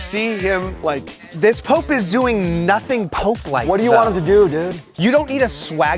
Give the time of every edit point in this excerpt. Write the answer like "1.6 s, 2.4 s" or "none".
1.2 s, 5.0 s